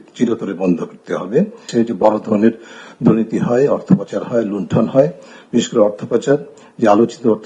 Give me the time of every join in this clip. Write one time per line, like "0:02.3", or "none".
0:01.6